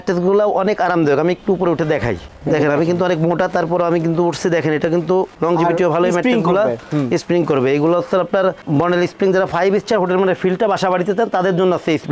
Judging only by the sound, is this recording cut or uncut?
uncut